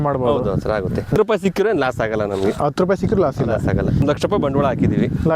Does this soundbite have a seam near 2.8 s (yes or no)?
no